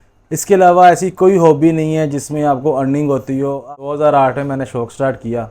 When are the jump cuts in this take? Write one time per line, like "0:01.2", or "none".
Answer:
0:03.6